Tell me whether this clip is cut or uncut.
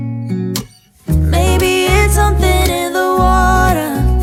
uncut